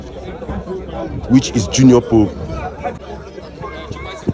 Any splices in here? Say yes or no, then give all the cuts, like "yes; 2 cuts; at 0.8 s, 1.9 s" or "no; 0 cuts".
yes; 1 cut; at 3.1 s